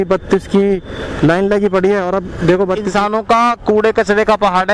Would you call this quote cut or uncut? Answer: cut